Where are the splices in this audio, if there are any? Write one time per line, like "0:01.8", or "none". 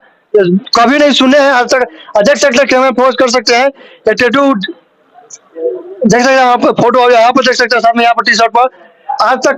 none